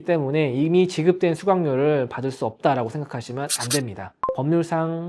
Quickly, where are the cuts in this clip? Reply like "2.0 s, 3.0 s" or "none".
4.2 s